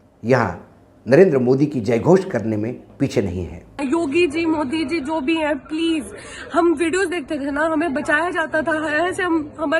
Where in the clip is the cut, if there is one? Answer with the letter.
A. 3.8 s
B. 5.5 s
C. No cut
A